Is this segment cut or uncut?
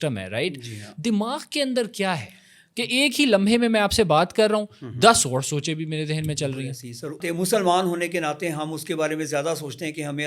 cut